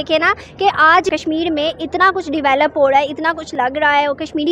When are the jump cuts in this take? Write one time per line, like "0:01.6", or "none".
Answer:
0:01.1